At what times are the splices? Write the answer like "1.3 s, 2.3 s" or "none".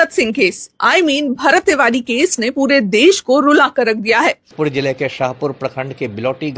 4.5 s